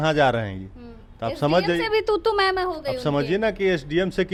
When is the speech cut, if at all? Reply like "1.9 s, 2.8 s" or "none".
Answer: none